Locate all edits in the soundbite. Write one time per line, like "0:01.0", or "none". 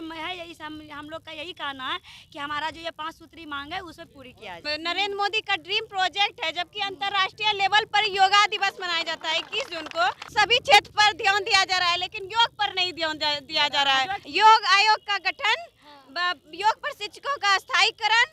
0:04.6
0:10.3
0:14.2